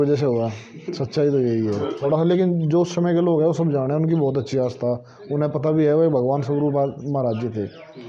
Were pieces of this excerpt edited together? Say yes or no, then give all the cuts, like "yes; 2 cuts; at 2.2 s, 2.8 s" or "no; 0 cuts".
yes; 1 cut; at 2.0 s